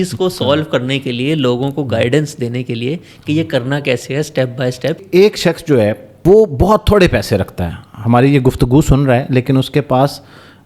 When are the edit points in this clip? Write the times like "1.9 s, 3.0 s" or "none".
5.0 s, 6.1 s